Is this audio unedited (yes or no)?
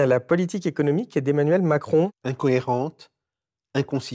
no